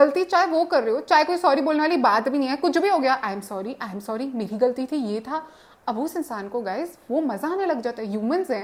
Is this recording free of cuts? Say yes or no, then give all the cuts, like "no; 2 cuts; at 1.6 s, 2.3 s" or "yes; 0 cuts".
yes; 0 cuts